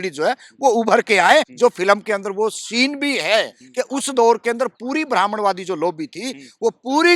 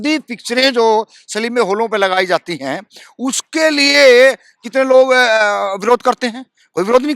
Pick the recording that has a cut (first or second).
first